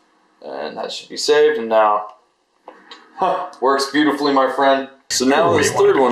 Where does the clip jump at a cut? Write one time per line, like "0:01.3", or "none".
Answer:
0:05.0